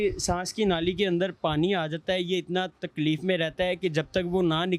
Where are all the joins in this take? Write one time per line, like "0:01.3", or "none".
none